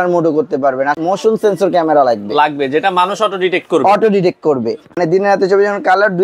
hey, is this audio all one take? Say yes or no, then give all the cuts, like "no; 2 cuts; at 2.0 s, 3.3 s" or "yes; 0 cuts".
no; 2 cuts; at 0.9 s, 4.9 s